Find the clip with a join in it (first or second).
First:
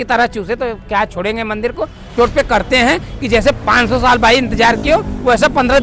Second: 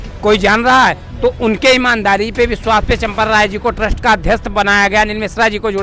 first